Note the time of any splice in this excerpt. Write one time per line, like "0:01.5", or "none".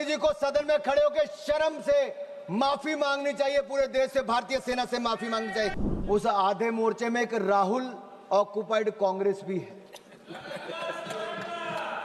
0:05.7